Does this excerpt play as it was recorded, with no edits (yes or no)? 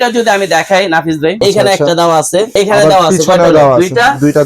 no